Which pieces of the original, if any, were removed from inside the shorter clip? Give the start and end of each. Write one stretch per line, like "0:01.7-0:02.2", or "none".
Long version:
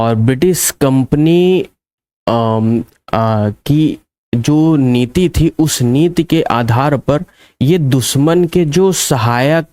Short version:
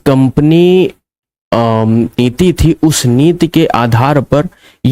0:02.9-0:05.0